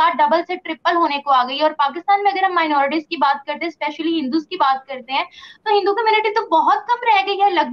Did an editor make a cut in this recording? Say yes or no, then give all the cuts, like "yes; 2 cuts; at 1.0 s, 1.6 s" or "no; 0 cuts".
no; 0 cuts